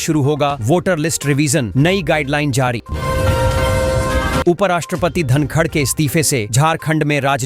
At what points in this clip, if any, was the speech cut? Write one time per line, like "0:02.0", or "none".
0:02.9
0:04.4